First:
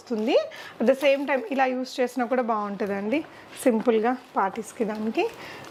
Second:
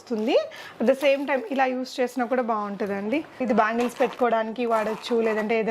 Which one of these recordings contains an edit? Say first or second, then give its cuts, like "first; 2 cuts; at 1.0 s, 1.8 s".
second; 1 cut; at 3.4 s